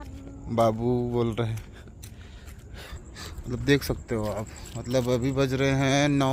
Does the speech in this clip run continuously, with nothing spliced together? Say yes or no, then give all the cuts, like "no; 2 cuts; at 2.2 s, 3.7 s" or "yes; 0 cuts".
no; 1 cut; at 2.9 s